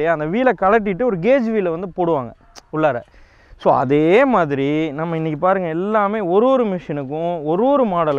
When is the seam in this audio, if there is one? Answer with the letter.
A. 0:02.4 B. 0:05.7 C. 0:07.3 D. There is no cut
D